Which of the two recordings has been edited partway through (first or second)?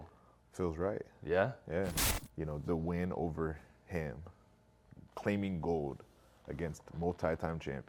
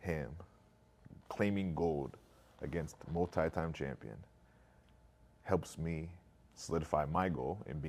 first